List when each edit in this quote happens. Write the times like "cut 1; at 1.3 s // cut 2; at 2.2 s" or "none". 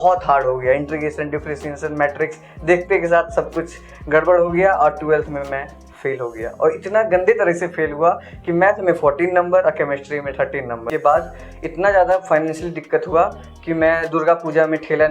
cut 1; at 10.9 s